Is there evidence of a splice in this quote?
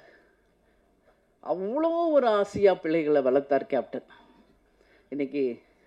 no; 0 cuts

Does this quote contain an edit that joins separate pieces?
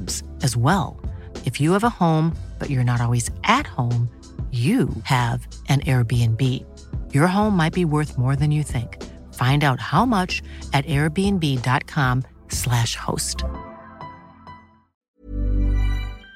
yes; 1 cut; at 15.1 s

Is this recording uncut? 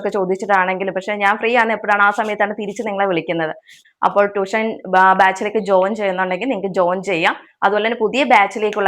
no; 1 cut; at 3.8 s

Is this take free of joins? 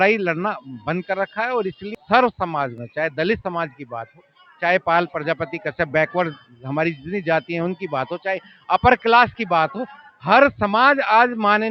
no; 1 cut; at 1.9 s

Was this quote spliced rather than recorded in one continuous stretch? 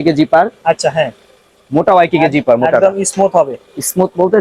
no; 0 cuts

